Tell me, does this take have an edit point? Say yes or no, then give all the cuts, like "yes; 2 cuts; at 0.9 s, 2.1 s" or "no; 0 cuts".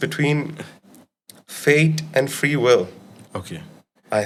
no; 0 cuts